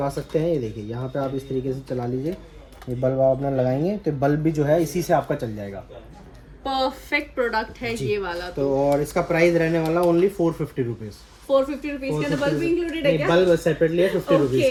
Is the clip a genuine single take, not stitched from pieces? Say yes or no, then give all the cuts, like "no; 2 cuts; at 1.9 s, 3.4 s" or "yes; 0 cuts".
yes; 0 cuts